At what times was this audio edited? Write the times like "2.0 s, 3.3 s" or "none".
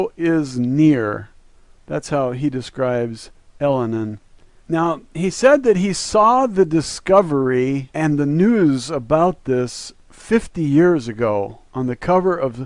none